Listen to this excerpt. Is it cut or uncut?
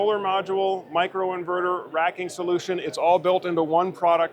uncut